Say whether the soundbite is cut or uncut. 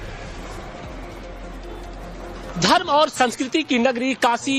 uncut